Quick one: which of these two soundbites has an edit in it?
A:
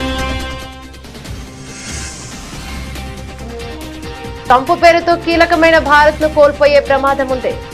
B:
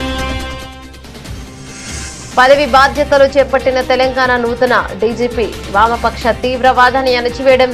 A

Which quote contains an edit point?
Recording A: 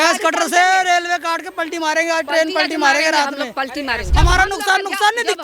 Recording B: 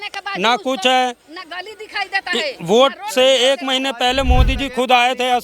A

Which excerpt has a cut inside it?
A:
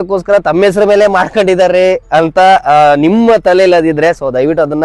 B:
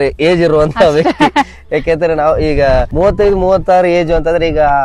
B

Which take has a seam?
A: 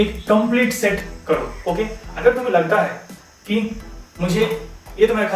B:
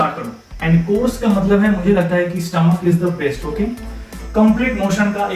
B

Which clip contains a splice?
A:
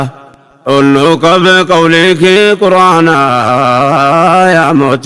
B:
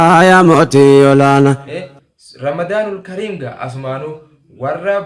B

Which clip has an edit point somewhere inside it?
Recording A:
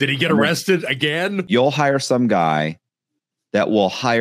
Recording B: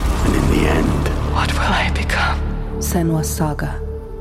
A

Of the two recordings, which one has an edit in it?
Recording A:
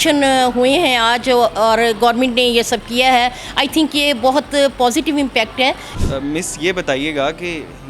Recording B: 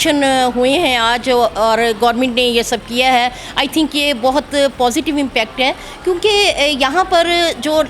A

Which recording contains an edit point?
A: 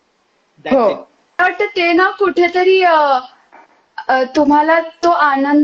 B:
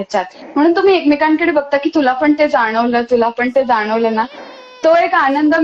A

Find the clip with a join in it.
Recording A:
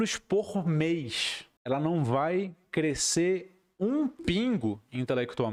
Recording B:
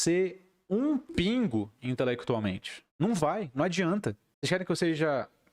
B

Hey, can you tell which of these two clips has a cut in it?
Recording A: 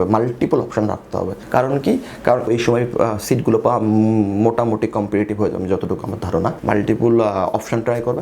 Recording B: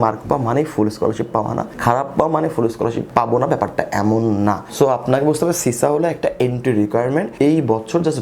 A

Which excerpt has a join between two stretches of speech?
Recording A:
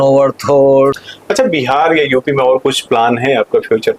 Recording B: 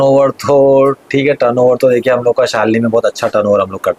A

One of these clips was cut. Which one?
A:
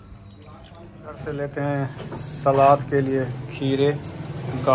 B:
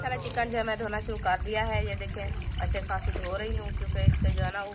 A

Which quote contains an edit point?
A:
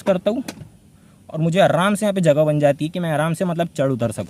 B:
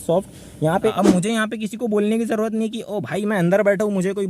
B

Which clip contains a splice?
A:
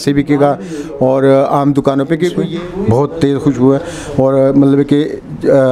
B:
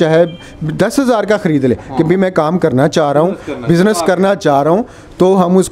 A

